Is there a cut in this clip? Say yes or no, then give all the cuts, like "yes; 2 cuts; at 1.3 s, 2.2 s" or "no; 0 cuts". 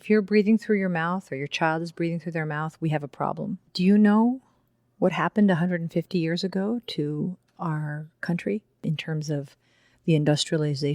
yes; 1 cut; at 3.6 s